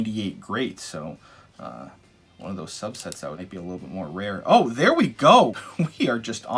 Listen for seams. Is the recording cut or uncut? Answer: cut